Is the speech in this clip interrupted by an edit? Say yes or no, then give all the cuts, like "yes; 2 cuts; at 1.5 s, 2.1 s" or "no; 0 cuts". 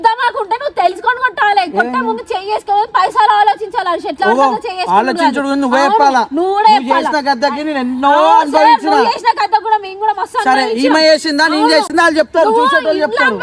no; 0 cuts